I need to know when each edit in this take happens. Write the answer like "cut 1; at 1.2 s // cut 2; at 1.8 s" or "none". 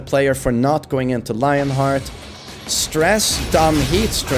none